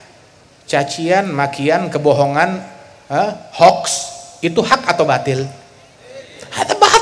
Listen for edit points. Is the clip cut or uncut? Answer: uncut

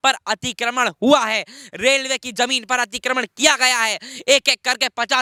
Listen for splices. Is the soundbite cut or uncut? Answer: uncut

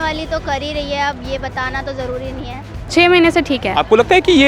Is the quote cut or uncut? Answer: cut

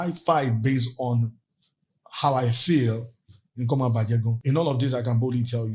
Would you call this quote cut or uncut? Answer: cut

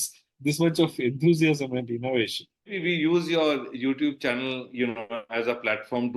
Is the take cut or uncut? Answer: cut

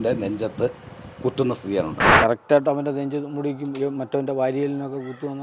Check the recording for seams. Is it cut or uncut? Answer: cut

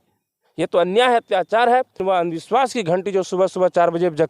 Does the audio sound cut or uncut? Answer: cut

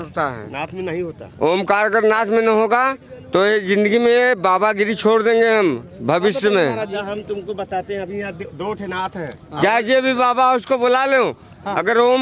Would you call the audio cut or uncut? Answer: uncut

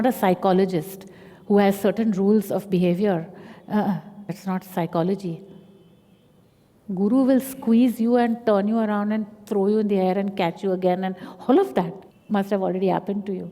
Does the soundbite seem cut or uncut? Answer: uncut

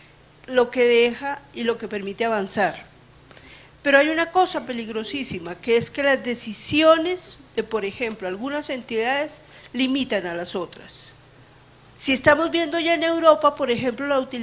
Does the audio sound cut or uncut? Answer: uncut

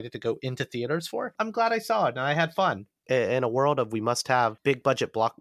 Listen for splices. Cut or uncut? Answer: cut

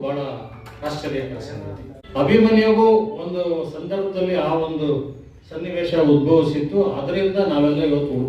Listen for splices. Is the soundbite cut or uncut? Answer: cut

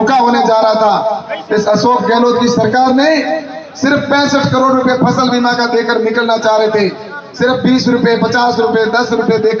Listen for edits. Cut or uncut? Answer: uncut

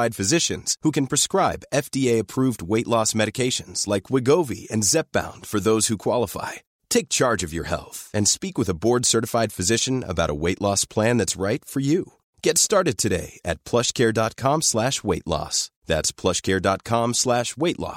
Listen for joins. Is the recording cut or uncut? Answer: uncut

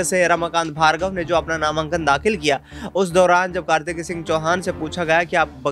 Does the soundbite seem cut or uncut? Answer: uncut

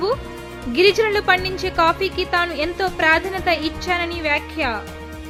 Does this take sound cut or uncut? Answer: uncut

